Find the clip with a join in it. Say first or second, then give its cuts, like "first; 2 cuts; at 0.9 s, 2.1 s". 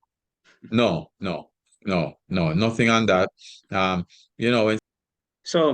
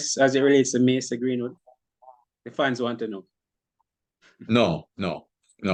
first; 1 cut; at 4.8 s